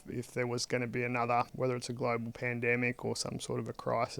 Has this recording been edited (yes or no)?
yes